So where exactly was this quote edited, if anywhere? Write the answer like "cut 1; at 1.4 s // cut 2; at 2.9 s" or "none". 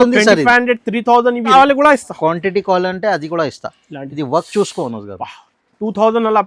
cut 1; at 1.5 s